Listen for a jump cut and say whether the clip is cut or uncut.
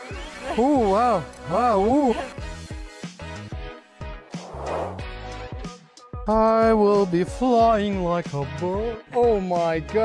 uncut